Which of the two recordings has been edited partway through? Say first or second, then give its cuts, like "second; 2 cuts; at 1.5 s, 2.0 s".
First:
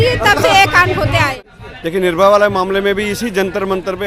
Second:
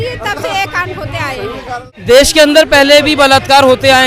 first; 1 cut; at 1.4 s